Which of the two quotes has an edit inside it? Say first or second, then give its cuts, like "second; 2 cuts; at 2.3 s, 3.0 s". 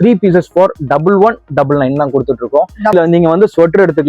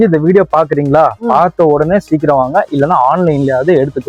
first; 1 cut; at 2.9 s